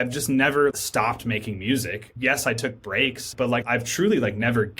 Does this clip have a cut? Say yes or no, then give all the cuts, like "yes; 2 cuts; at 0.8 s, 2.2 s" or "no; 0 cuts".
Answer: yes; 3 cuts; at 0.7 s, 2.1 s, 3.5 s